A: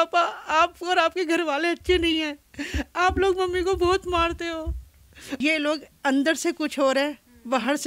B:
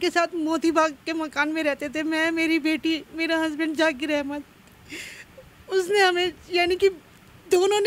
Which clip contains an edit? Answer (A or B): A